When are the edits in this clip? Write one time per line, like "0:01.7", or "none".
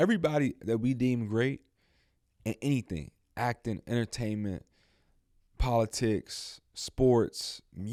none